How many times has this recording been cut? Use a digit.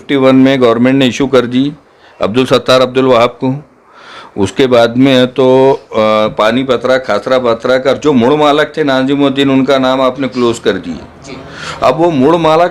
0